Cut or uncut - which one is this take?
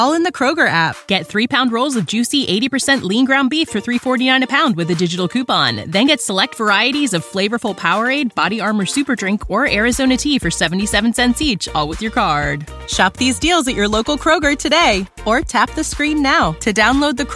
uncut